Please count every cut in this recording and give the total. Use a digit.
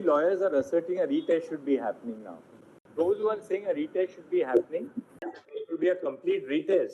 0